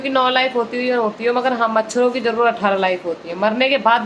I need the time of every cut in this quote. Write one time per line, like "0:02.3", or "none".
none